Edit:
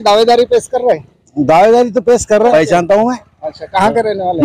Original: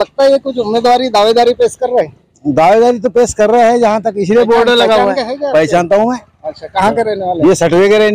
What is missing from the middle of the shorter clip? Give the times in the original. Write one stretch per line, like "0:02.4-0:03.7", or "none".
0:03.6-0:05.5